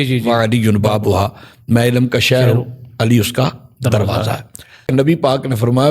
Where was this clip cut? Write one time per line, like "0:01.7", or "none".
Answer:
0:04.9